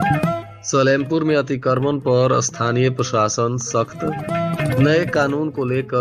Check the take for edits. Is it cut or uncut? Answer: uncut